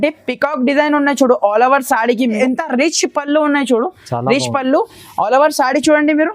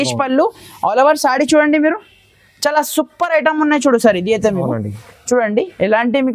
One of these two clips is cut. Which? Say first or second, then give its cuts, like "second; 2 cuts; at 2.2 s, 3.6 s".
first; 1 cut; at 2.4 s